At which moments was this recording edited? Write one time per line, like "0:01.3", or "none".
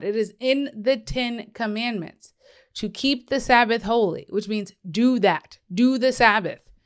none